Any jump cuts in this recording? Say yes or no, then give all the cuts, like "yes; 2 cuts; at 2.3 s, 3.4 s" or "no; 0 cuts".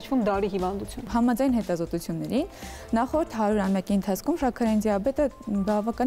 yes; 1 cut; at 1.0 s